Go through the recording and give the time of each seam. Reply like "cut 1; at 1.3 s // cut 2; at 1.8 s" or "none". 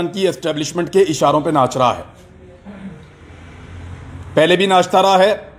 none